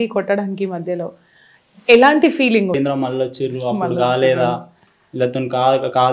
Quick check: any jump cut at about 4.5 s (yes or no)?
no